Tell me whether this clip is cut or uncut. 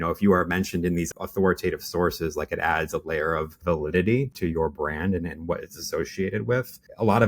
cut